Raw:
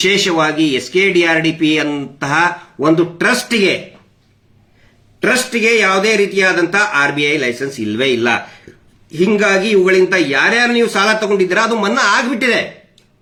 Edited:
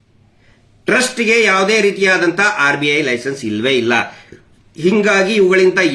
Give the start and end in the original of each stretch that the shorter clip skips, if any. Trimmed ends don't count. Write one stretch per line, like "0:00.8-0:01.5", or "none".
none